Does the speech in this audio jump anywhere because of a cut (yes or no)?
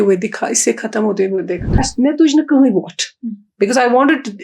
yes